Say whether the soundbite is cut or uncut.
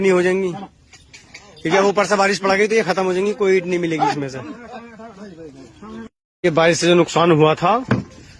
cut